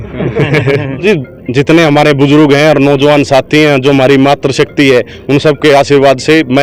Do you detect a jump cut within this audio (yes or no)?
yes